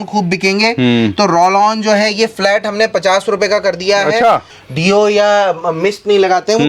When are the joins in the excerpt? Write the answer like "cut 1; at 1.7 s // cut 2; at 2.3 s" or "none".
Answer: cut 1; at 4.5 s

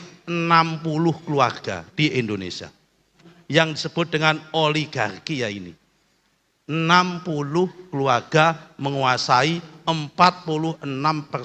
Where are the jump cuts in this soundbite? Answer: cut 1; at 3.3 s

